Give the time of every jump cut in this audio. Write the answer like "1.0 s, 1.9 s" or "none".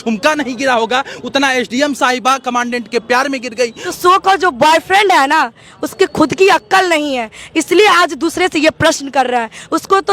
3.8 s